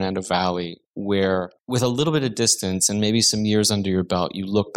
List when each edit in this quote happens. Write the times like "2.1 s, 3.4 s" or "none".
1.6 s